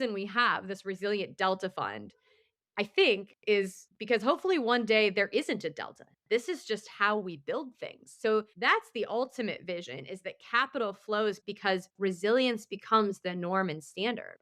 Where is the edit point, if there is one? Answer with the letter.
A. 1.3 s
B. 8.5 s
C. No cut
B